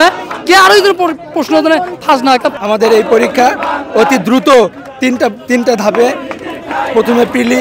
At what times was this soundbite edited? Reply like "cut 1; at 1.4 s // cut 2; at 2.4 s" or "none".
cut 1; at 2.5 s